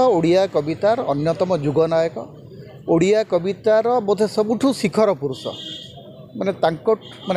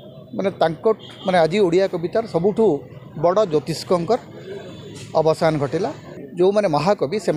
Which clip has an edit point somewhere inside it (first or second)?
second